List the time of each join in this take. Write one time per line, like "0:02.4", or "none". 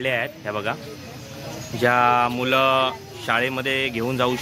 none